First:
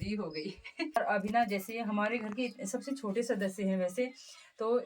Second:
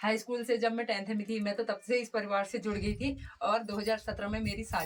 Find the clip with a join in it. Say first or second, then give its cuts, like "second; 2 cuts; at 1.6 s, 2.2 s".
first; 1 cut; at 1.0 s